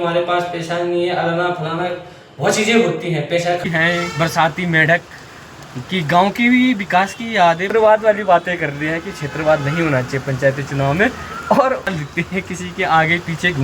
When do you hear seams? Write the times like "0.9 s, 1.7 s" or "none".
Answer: 3.7 s, 7.6 s, 11.9 s